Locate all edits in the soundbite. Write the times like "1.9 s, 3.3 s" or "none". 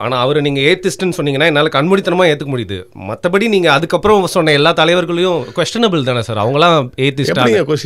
none